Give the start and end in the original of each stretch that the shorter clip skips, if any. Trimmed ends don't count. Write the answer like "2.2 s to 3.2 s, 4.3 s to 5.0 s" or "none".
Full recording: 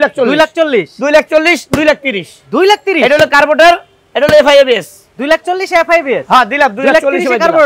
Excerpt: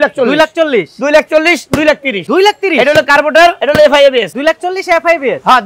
2.1 s to 2.4 s, 3.8 s to 4.1 s, 4.9 s to 5.2 s